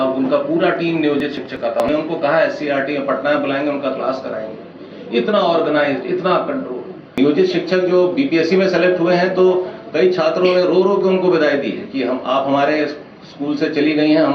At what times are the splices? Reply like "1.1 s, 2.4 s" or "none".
7.2 s

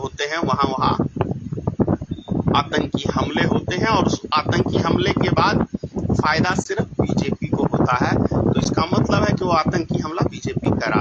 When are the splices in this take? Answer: none

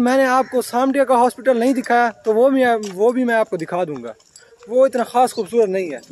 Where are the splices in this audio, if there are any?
none

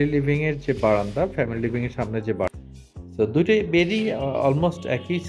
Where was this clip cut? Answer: 2.5 s

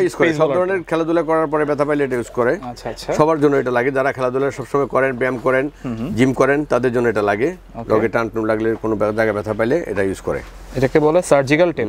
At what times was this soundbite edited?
none

